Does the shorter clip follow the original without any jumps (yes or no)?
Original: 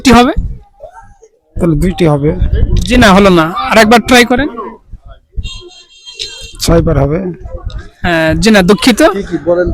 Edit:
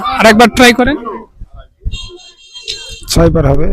yes